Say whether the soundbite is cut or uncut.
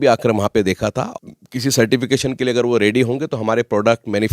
cut